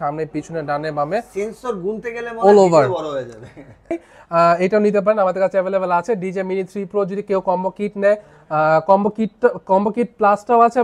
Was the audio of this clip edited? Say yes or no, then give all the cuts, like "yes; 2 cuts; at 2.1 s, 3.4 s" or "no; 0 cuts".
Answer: yes; 1 cut; at 3.9 s